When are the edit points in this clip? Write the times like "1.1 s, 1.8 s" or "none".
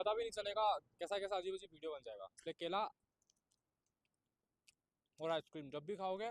none